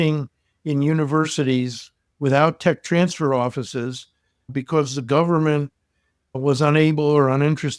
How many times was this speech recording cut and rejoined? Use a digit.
1